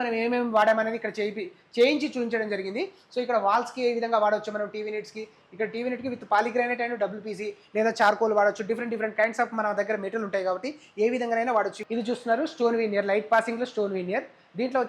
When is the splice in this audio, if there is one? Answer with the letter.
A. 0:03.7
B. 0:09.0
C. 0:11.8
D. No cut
C